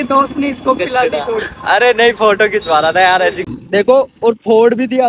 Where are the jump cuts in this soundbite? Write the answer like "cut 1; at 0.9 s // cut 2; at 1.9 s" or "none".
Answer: cut 1; at 3.4 s